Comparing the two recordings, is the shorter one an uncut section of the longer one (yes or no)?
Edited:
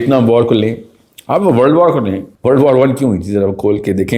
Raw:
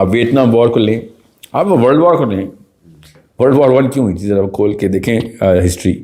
no